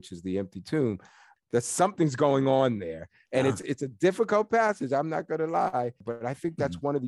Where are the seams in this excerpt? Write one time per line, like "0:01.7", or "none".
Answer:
0:01.3
0:06.1